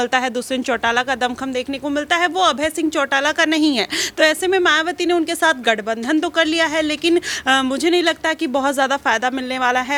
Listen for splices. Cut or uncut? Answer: uncut